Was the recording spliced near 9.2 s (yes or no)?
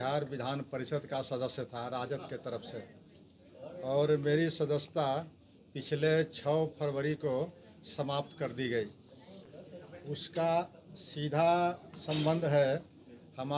no